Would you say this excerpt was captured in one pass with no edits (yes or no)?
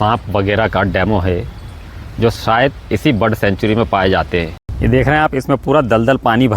no